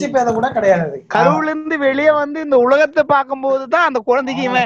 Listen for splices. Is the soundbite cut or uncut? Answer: cut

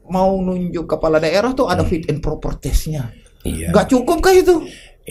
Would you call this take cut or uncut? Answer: uncut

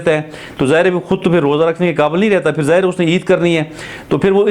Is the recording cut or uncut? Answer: uncut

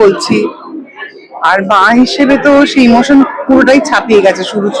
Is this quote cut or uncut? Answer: uncut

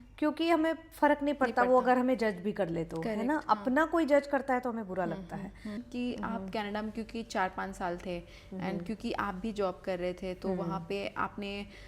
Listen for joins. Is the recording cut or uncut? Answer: cut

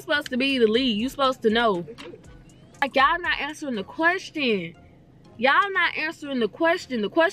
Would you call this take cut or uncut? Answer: cut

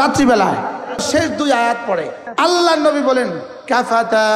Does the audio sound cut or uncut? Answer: cut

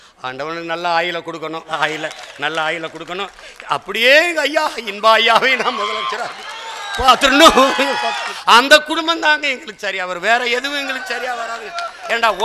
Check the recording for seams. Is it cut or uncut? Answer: cut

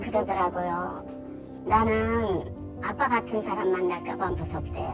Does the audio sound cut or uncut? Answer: uncut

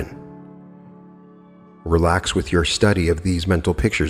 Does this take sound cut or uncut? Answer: uncut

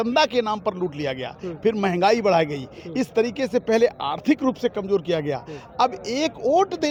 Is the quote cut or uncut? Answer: uncut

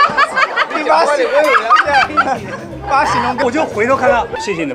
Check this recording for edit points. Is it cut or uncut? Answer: cut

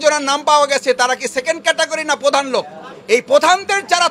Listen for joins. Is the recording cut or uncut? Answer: uncut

